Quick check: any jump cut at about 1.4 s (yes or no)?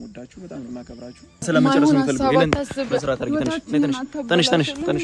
yes